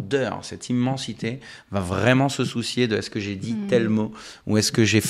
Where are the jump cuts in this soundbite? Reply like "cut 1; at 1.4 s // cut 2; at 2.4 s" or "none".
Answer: none